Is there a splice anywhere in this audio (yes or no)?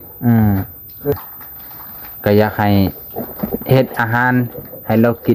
yes